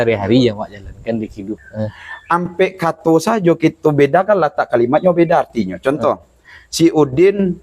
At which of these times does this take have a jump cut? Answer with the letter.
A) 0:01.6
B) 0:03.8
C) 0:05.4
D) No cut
A